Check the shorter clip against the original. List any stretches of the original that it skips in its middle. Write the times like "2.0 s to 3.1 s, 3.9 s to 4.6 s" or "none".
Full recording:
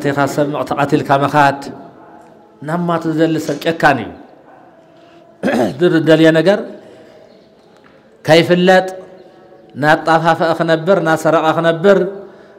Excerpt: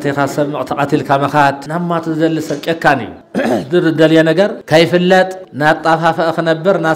1.6 s to 2.6 s, 4.2 s to 5.3 s, 6.7 s to 8.2 s, 9.0 s to 9.7 s